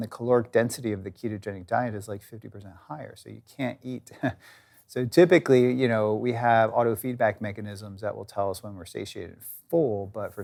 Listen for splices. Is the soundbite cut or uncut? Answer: uncut